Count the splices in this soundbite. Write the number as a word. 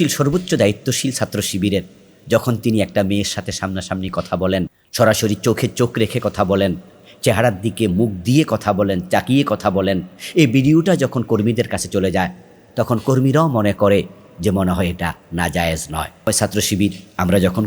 two